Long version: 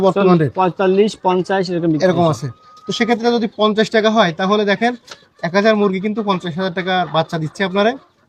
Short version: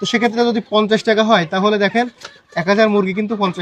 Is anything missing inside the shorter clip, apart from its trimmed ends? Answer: no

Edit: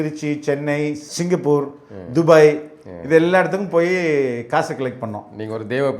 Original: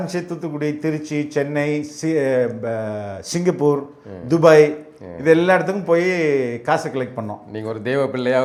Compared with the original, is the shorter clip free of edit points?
no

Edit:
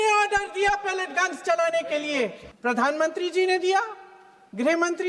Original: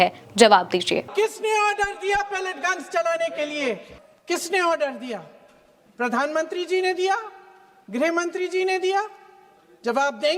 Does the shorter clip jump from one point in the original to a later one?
yes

